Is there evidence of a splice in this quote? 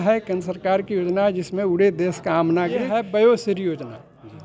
yes; 1 cut; at 2.9 s

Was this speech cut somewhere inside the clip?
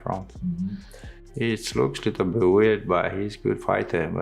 yes; 1 cut; at 1.2 s

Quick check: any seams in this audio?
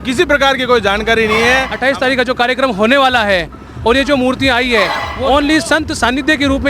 yes; 2 cuts; at 1.7 s, 5.1 s

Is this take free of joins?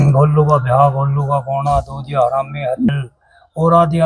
no; 1 cut; at 2.9 s

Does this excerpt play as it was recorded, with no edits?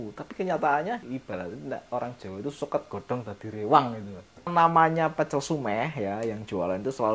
no; 2 cuts; at 1.0 s, 4.5 s

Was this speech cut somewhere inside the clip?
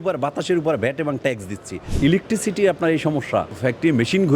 yes; 2 cuts; at 1.8 s, 3.5 s

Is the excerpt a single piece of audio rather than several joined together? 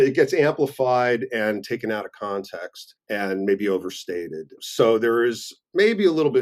yes; 0 cuts

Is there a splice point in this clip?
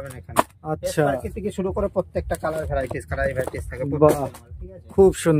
no; 0 cuts

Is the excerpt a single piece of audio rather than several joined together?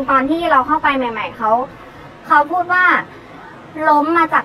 yes; 0 cuts

